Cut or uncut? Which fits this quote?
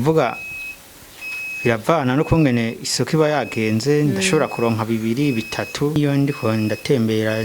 cut